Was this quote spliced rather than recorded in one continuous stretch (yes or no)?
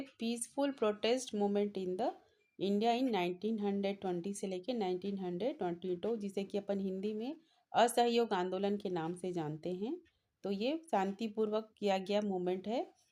no